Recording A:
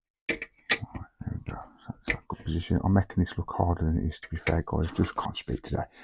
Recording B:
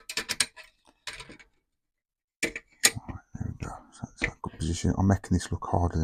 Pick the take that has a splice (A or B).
A